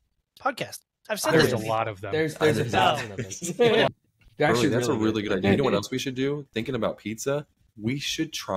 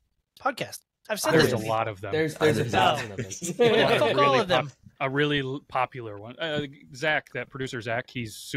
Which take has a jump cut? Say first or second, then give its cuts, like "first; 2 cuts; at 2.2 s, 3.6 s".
first; 1 cut; at 3.9 s